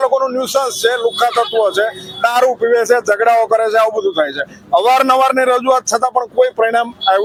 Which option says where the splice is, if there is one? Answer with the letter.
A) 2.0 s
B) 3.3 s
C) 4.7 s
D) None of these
D